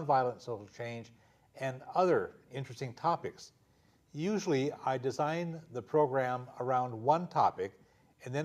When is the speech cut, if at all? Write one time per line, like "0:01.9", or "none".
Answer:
0:05.8